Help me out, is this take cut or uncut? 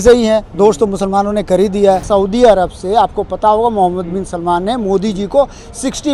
cut